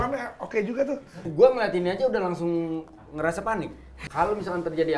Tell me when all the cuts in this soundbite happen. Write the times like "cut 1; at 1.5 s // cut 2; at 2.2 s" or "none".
cut 1; at 1.3 s // cut 2; at 4.0 s